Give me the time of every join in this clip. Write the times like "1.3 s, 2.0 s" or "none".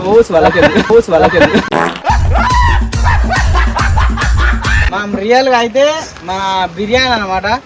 4.8 s